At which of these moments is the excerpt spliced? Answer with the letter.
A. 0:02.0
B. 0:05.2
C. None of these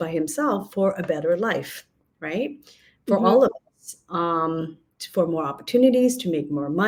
C